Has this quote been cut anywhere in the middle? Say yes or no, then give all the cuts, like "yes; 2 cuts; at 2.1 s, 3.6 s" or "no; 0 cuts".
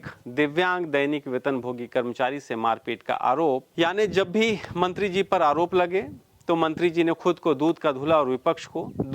yes; 1 cut; at 3.7 s